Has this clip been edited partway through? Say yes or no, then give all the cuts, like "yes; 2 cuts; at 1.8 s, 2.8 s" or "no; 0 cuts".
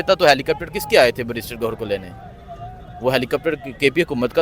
no; 0 cuts